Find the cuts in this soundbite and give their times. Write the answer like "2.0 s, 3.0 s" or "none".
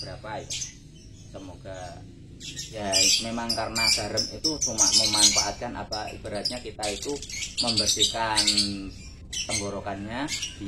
2.6 s